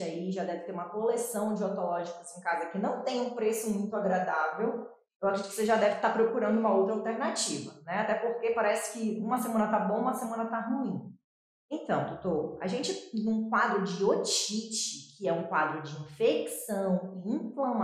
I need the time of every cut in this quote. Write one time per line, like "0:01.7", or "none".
none